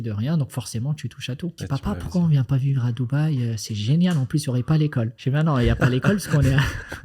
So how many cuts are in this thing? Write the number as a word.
two